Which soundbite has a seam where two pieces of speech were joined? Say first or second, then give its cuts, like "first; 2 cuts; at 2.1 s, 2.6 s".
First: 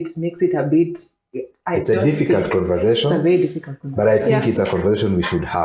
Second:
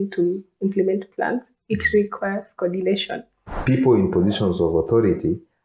second; 1 cut; at 3.5 s